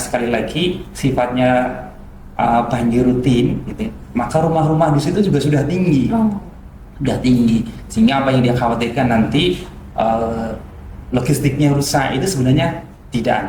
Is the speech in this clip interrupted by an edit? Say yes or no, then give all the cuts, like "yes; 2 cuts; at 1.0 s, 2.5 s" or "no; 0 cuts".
no; 0 cuts